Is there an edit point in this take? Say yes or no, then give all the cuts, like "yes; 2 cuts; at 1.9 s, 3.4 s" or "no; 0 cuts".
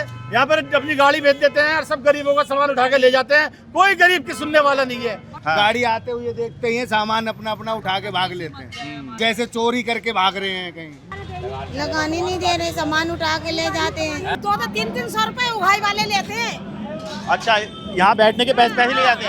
yes; 4 cuts; at 5.3 s, 9.1 s, 11.1 s, 14.4 s